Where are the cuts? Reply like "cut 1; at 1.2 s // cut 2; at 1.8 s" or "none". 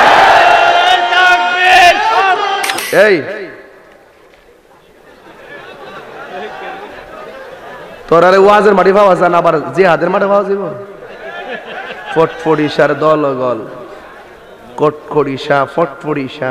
cut 1; at 2.8 s